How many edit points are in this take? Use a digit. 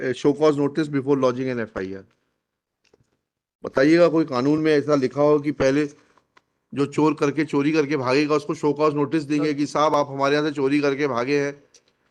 0